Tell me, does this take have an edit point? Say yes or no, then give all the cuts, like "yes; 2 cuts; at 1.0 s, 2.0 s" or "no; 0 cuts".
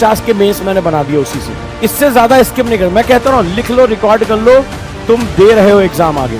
no; 0 cuts